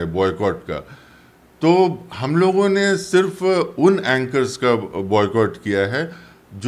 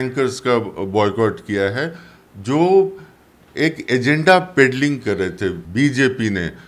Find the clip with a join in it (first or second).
second